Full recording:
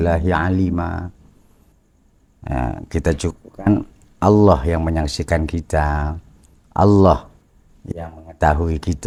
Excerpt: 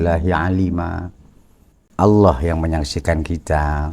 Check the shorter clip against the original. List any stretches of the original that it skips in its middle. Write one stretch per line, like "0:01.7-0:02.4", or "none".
0:01.8-0:04.0